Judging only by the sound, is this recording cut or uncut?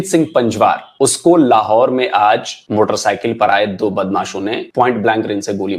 cut